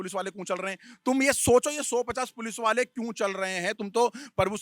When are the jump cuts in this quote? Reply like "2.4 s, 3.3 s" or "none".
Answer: none

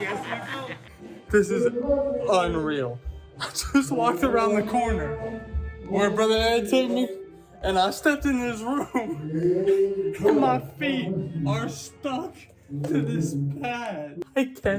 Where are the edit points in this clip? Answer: 0.9 s

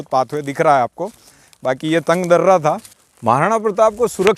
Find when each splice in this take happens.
2.9 s

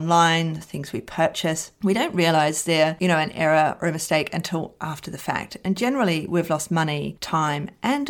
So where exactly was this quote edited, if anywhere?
none

